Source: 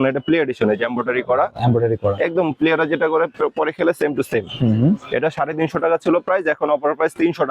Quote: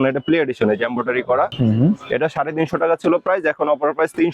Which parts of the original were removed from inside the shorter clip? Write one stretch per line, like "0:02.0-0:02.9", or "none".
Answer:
0:01.5-0:04.5

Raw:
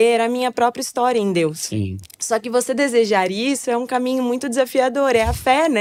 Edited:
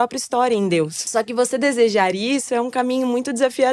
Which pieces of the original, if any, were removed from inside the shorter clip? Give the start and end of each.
0:01.6-0:02.1

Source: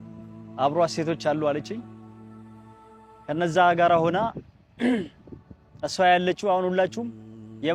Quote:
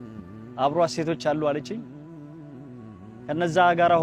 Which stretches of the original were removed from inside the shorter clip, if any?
none

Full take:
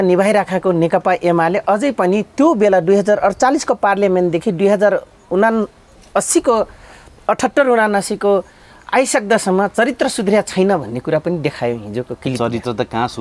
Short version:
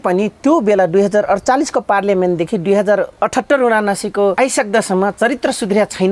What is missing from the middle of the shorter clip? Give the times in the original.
0:05.1-0:07.2
0:08.4-0:08.9

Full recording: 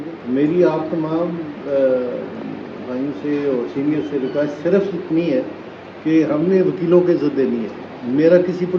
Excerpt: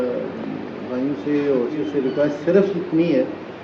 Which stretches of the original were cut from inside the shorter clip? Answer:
0:03.8-0:04.0

